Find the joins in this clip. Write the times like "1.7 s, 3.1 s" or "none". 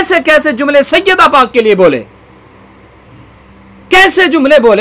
none